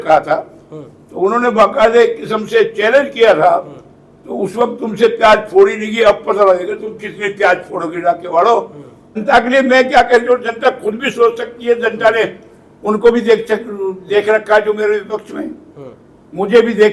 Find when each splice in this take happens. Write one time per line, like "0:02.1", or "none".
0:09.2